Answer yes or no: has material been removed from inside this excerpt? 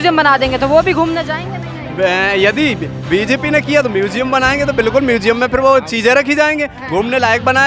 no